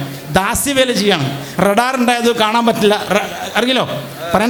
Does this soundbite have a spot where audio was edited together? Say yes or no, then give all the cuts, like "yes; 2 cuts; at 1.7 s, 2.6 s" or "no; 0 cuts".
no; 0 cuts